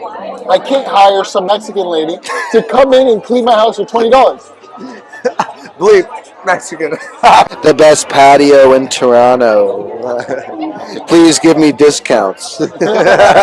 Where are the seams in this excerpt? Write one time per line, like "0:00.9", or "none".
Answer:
0:07.5